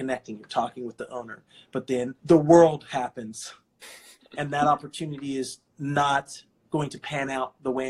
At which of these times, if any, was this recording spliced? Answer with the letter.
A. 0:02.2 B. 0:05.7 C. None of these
A